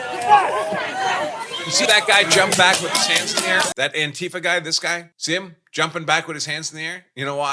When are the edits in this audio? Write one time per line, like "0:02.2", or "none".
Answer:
0:03.7
0:05.1